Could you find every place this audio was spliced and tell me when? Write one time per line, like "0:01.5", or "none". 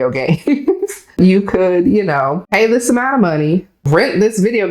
0:01.2
0:02.4
0:03.7